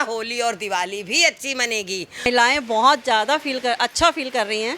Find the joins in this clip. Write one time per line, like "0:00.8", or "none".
0:02.3